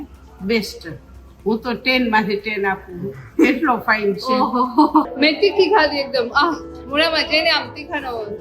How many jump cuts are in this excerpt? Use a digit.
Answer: 1